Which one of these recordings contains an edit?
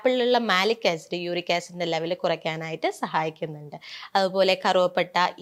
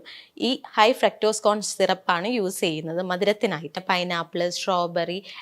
second; 1 cut; at 3.8 s

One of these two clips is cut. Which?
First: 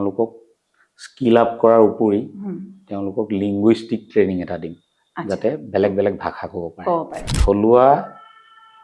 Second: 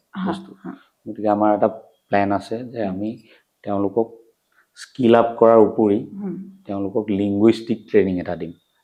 first; 1 cut; at 7.2 s

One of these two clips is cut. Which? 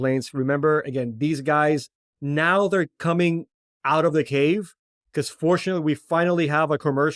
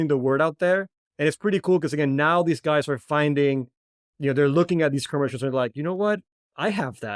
second; 1 cut; at 1.0 s

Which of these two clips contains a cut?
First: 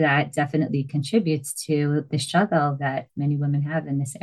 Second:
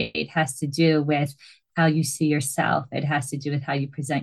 first; 1 cut; at 3.1 s

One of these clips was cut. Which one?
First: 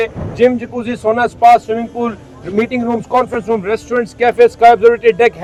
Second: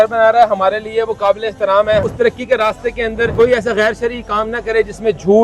second; 2 cuts; at 2.0 s, 3.3 s

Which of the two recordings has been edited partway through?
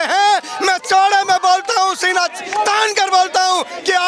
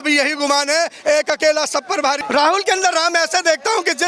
second; 1 cut; at 2.2 s

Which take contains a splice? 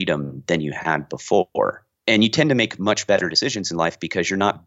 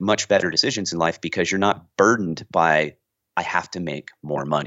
first; 1 cut; at 1.9 s

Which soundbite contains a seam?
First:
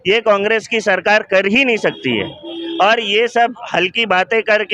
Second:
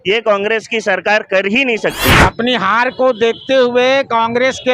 second; 1 cut; at 2.2 s

